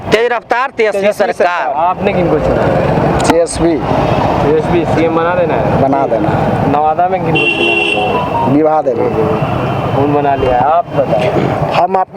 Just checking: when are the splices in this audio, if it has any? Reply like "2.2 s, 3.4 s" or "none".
none